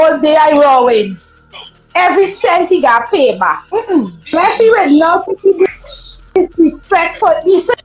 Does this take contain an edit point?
no; 0 cuts

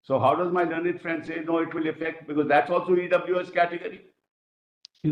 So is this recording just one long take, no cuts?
yes; 0 cuts

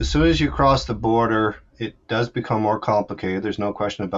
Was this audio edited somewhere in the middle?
no; 0 cuts

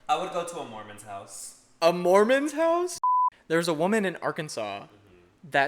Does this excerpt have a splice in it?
yes; 1 cut; at 3.0 s

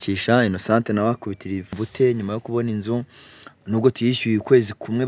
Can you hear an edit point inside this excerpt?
yes; 1 cut; at 1.7 s

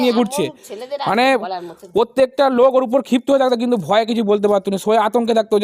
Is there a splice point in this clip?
no; 0 cuts

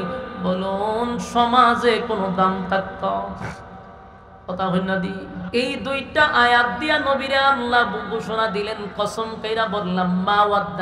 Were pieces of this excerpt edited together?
yes; 1 cut; at 5.4 s

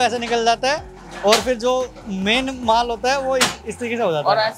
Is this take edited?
no; 0 cuts

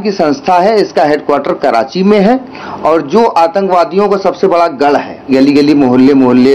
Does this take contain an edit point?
yes; 1 cut; at 5.3 s

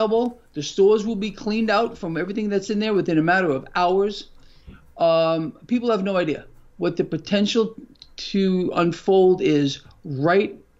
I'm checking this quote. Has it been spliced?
no; 0 cuts

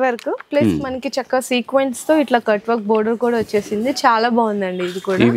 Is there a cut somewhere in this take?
no; 0 cuts

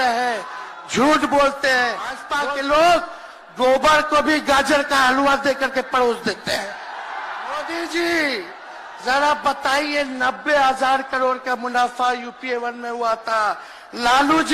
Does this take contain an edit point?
yes; 2 cuts; at 2.3 s, 7.7 s

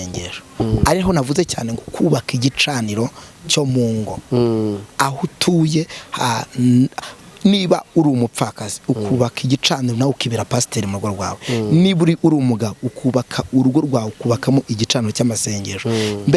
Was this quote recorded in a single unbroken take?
yes; 0 cuts

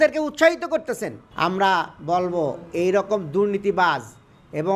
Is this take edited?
yes; 1 cut; at 1.2 s

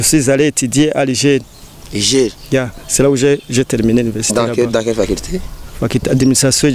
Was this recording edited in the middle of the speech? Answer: no; 0 cuts

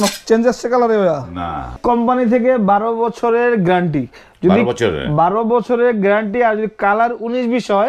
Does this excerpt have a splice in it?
yes; 1 cut; at 1.8 s

